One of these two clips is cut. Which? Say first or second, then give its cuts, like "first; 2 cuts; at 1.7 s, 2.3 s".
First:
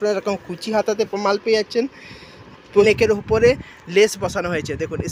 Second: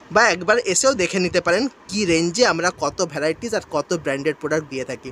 first; 1 cut; at 2.8 s